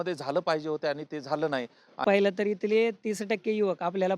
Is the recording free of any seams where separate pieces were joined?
no; 1 cut; at 2.0 s

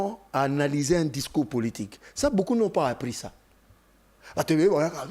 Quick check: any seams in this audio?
no; 0 cuts

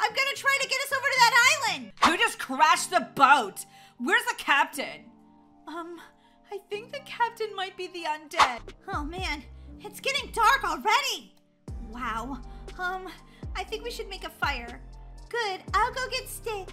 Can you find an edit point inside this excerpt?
yes; 2 cuts; at 1.9 s, 8.7 s

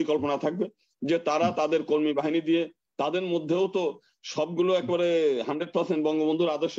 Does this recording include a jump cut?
no; 0 cuts

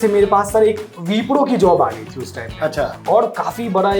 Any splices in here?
no; 0 cuts

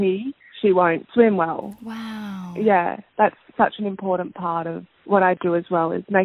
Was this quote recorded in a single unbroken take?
yes; 0 cuts

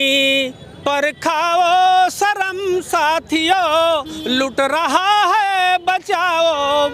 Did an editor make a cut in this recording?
no; 0 cuts

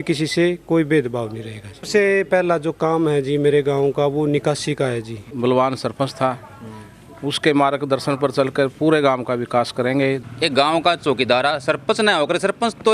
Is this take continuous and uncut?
no; 3 cuts; at 1.8 s, 5.3 s, 10.2 s

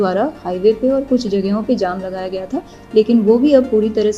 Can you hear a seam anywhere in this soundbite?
no; 0 cuts

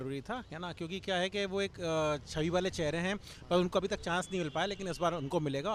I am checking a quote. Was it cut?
no; 0 cuts

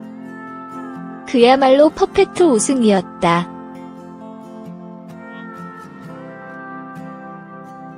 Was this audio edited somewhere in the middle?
no; 0 cuts

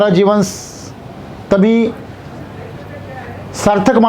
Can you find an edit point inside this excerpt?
no; 0 cuts

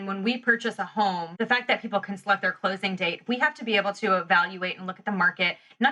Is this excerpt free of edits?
no; 1 cut; at 1.3 s

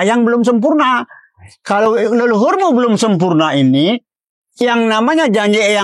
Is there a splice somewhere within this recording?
no; 0 cuts

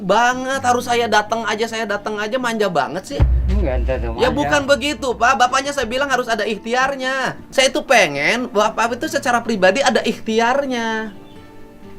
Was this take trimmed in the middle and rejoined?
yes; 1 cut; at 7.4 s

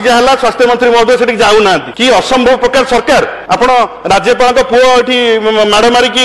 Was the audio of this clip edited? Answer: yes; 2 cuts; at 1.9 s, 3.4 s

